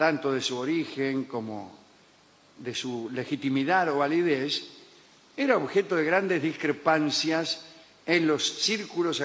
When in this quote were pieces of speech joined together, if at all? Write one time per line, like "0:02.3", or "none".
0:03.3